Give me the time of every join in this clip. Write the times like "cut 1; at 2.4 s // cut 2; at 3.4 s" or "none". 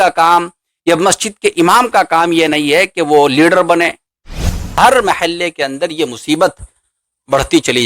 cut 1; at 4.7 s